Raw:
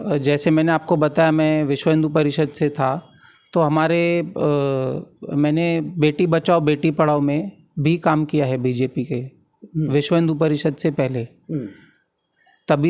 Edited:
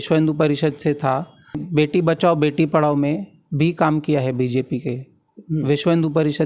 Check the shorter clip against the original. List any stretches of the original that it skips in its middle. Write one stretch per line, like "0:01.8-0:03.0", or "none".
0:03.4-0:05.9